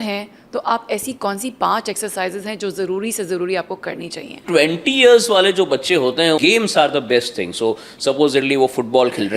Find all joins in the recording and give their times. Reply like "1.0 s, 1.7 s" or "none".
4.4 s, 6.4 s